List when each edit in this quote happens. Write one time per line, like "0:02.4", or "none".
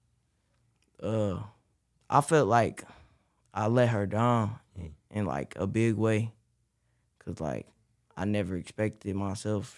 0:01.9